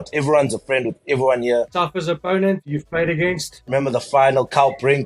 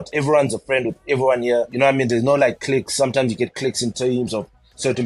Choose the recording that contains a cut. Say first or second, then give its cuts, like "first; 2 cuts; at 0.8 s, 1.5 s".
first; 2 cuts; at 1.7 s, 3.7 s